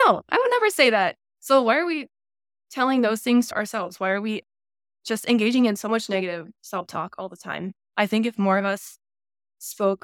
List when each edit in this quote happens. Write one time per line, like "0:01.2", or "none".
0:03.5